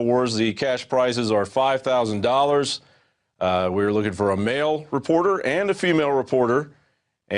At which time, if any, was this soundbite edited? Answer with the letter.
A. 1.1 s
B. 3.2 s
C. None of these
B